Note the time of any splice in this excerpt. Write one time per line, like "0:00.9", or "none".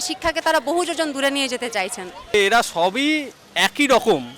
0:02.3